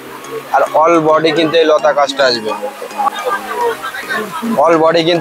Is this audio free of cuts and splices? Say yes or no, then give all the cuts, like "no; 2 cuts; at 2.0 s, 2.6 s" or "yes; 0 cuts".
no; 1 cut; at 3.1 s